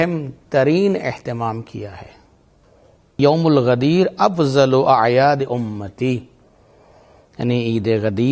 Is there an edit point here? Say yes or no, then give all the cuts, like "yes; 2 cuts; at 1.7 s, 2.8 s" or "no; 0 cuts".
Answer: yes; 1 cut; at 3.2 s